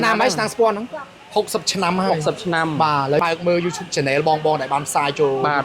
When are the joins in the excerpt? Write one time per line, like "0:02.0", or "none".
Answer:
0:03.2